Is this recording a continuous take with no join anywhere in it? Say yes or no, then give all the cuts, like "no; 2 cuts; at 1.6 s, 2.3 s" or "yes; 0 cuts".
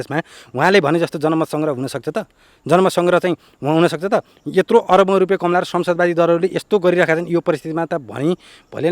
yes; 0 cuts